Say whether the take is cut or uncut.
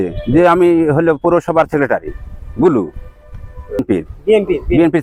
cut